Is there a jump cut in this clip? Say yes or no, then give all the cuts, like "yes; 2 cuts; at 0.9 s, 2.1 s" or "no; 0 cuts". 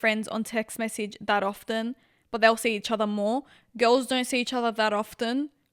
no; 0 cuts